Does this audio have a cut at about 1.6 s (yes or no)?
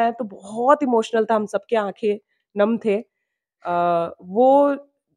no